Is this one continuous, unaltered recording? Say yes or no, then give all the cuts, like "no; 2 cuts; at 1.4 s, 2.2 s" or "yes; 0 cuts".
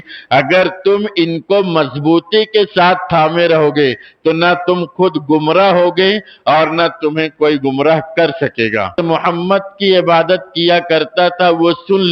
no; 1 cut; at 9.0 s